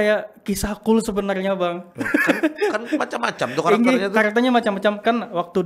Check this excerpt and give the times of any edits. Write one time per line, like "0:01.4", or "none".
none

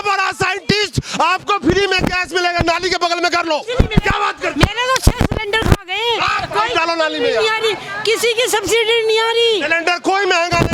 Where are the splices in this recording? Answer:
none

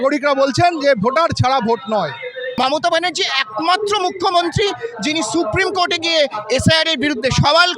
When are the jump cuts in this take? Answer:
0:02.5

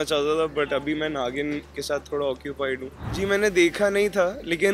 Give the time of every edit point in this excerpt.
0:03.0

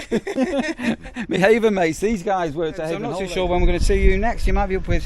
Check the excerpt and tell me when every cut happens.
0:03.1

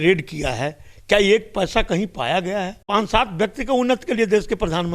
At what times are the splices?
0:02.8

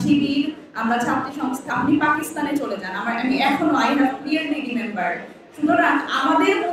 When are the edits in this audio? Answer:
0:01.6

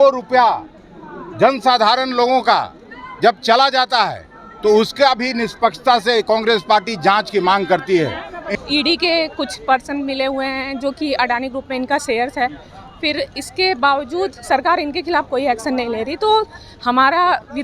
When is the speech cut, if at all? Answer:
0:08.4

